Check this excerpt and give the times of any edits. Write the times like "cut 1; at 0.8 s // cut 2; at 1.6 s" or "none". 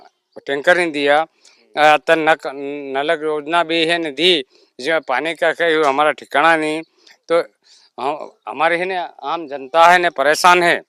none